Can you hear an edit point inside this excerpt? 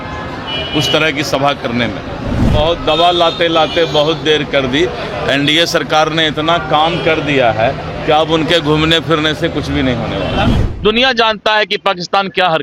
yes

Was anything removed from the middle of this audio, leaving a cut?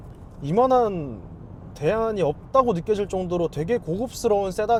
no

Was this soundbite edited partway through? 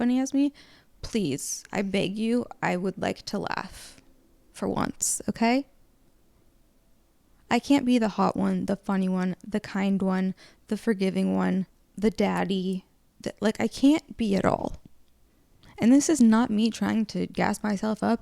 no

